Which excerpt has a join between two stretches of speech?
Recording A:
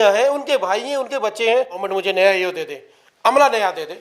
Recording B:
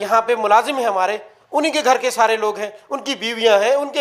A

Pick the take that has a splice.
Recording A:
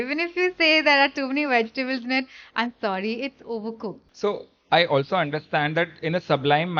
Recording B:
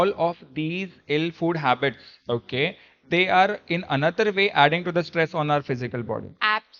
A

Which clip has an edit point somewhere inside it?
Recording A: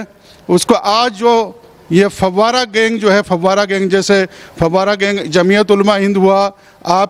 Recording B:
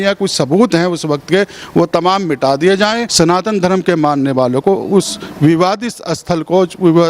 B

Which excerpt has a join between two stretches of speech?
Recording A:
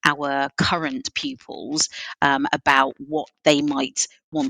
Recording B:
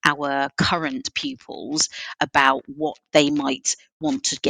B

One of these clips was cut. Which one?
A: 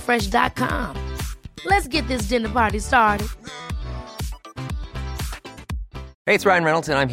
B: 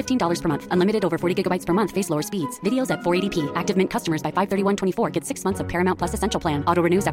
A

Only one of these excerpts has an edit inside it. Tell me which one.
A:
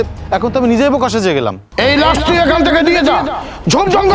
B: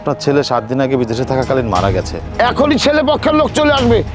B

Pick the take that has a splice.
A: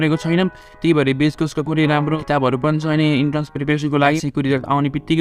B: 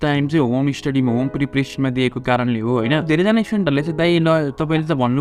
A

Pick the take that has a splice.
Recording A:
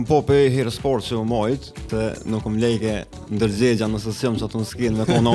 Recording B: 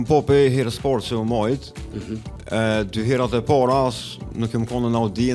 A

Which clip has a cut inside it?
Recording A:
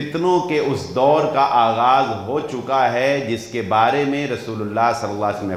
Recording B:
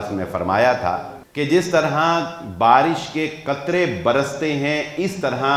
B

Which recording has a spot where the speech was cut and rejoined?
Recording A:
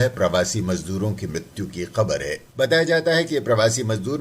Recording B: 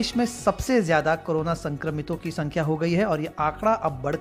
A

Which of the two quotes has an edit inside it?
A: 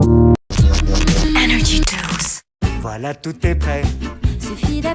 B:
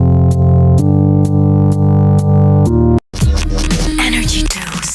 A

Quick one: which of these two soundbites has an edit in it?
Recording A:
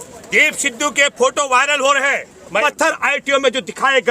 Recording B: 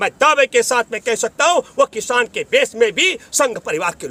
A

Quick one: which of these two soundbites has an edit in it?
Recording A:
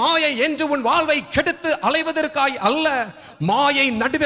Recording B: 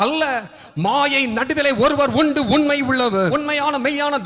B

